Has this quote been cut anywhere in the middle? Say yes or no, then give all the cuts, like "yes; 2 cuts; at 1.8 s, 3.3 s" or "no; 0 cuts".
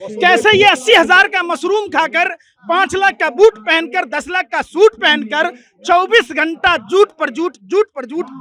no; 0 cuts